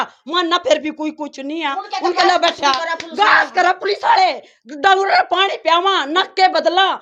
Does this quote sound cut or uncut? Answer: uncut